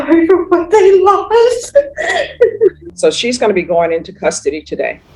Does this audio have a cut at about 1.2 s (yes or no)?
no